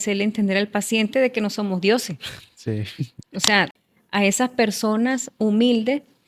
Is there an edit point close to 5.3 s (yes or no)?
no